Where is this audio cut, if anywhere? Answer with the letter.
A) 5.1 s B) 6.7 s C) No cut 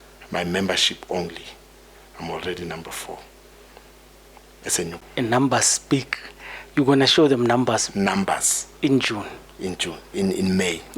A